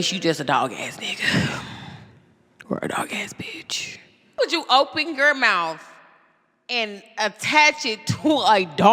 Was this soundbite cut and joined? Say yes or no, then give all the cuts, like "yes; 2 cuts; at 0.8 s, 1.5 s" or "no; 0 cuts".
yes; 1 cut; at 4.4 s